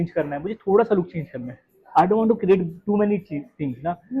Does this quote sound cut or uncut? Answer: uncut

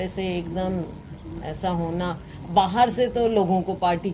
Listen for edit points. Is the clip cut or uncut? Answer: uncut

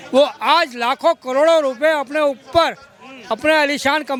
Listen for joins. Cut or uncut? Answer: uncut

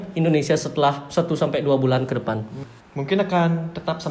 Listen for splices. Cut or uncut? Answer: cut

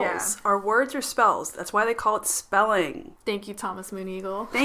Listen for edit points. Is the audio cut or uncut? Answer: cut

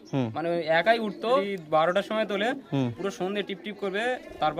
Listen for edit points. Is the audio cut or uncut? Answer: cut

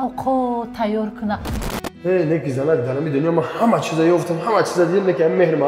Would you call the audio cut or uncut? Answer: cut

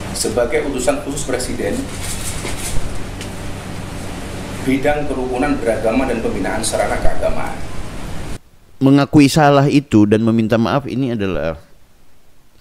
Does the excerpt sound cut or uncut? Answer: cut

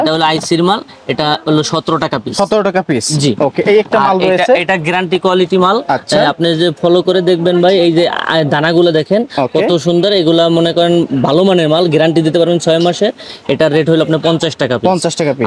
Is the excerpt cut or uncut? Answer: uncut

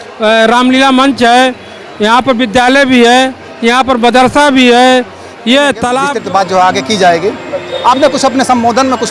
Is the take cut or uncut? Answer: cut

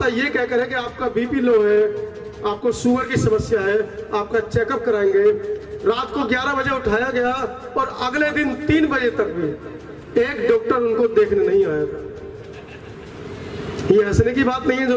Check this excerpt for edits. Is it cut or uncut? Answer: uncut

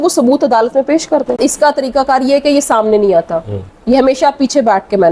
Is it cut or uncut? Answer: cut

